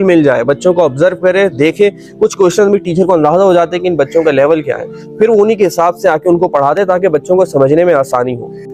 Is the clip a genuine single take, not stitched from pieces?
yes; 0 cuts

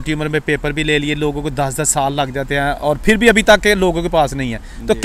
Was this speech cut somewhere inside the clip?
no; 0 cuts

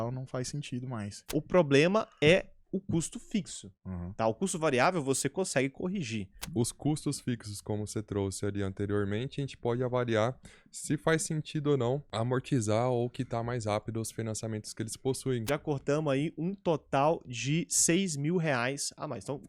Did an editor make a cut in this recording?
yes; 4 cuts; at 1.2 s, 6.4 s, 12.1 s, 15.4 s

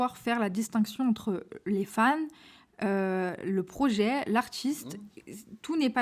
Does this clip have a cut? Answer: no; 0 cuts

